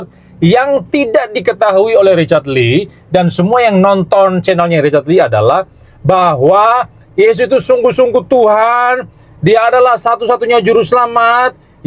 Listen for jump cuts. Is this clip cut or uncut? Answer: uncut